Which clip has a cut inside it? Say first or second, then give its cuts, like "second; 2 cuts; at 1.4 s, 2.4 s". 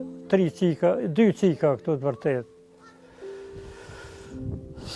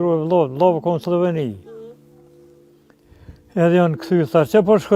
first; 2 cuts; at 2.7 s, 4.0 s